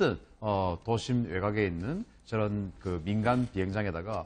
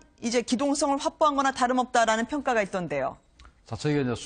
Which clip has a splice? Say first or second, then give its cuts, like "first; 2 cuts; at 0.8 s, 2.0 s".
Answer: second; 1 cut; at 3.0 s